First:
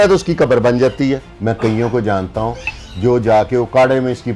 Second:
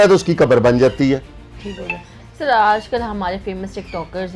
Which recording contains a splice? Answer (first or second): first